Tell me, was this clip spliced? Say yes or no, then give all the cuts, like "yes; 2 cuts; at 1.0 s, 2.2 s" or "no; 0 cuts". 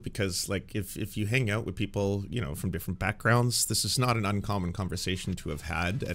no; 0 cuts